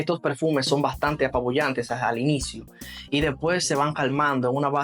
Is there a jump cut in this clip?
no; 0 cuts

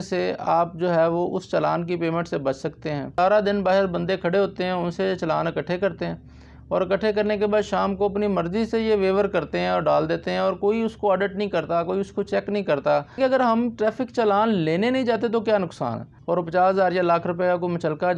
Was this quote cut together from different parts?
yes; 3 cuts; at 3.1 s, 13.2 s, 16.1 s

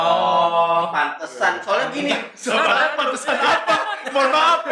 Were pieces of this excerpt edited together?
no; 0 cuts

